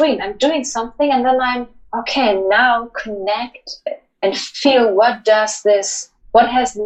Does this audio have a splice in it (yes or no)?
no